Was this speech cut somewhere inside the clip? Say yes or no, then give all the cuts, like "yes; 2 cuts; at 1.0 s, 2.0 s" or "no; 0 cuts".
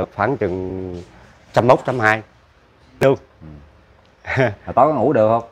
yes; 1 cut; at 3.0 s